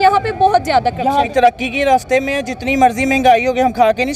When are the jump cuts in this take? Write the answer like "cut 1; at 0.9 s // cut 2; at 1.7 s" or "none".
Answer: cut 1; at 1.3 s